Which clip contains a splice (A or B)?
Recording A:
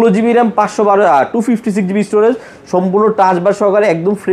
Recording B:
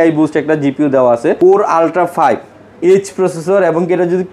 B